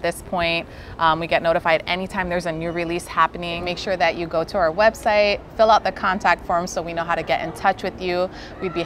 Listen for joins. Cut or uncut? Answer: cut